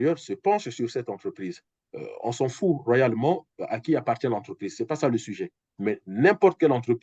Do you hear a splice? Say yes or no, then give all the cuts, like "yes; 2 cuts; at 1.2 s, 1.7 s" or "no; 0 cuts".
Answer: no; 0 cuts